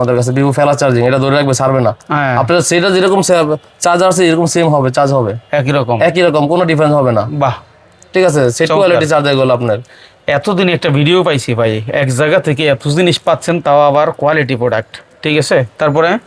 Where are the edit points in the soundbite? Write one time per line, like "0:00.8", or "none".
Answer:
none